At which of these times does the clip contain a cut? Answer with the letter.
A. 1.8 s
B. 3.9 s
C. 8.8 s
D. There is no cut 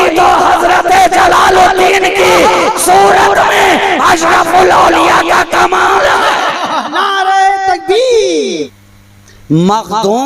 C